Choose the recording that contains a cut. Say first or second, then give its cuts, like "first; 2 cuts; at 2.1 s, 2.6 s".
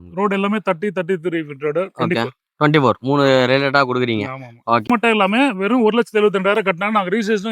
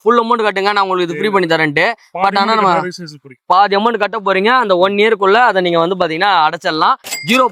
first; 1 cut; at 4.9 s